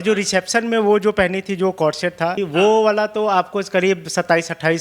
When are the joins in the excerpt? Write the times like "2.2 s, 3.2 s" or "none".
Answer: 2.4 s